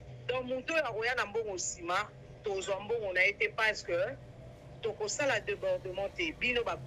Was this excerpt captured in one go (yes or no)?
yes